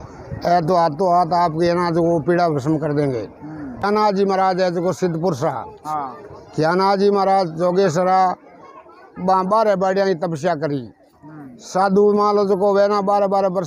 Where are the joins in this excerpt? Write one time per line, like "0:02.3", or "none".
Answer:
0:03.8